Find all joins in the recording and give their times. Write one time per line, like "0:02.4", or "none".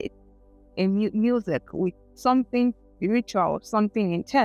none